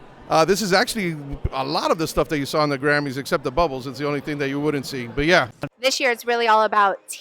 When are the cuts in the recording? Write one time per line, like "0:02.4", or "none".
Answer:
0:05.6